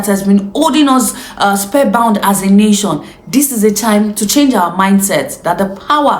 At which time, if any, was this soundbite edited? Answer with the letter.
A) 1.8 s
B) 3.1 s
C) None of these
C